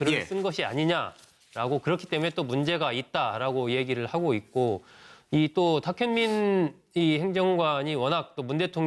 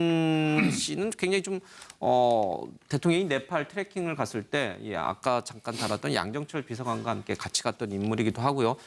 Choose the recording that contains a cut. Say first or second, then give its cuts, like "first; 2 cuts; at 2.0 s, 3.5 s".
first; 1 cut; at 4.7 s